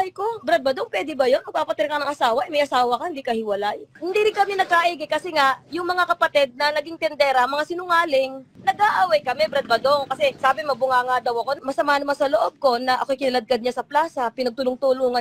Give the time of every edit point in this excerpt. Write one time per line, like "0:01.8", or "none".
0:04.0
0:08.5
0:10.4
0:11.6